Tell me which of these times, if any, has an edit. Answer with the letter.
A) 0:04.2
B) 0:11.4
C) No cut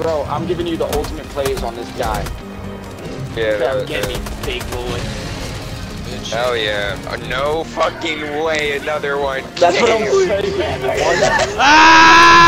C